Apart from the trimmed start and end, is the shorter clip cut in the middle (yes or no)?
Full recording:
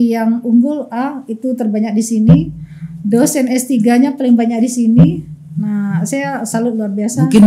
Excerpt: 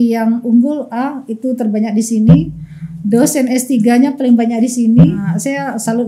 yes